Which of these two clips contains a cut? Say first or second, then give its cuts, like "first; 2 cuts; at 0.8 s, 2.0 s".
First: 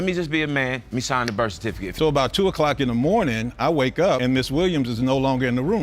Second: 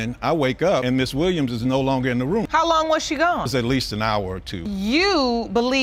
first; 1 cut; at 1.9 s